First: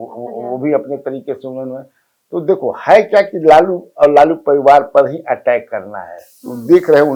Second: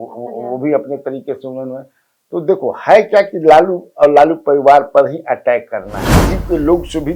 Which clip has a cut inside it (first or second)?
second